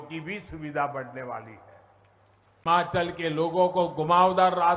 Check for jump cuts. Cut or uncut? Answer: cut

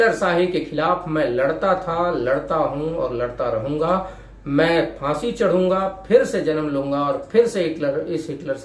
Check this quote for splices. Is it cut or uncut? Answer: uncut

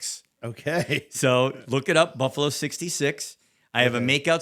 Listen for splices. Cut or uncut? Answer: uncut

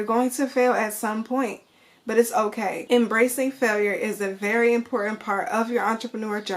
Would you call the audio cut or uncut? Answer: cut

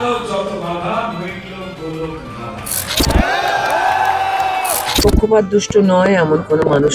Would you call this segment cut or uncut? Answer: cut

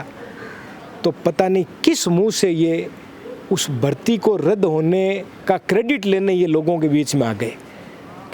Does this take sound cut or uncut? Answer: uncut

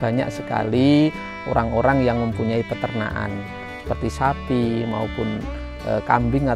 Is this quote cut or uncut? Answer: uncut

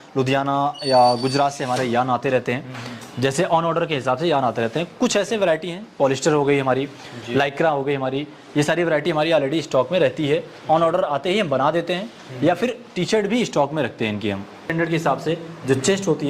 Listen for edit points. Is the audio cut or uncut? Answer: cut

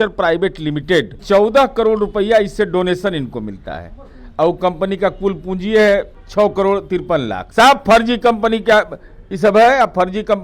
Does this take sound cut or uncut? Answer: cut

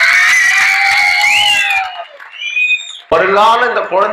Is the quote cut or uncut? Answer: cut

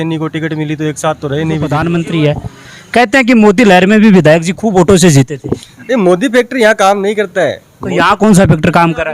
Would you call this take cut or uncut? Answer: cut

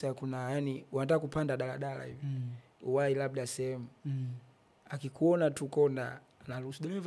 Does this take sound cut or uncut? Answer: uncut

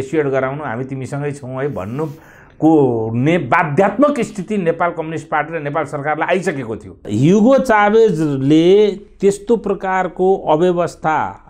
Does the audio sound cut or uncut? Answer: cut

